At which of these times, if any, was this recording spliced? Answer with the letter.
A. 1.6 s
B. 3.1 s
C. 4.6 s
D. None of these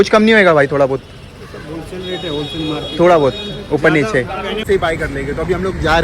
C